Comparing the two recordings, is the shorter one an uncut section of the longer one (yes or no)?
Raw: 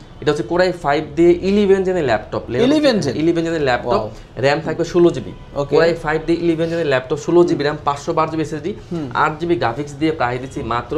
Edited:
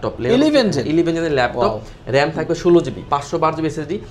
no